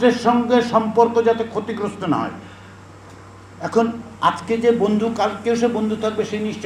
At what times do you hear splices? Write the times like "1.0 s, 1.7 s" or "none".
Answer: none